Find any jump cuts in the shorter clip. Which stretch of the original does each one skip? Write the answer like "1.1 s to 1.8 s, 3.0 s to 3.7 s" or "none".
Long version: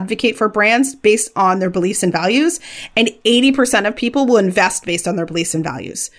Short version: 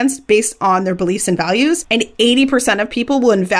2.6 s to 2.9 s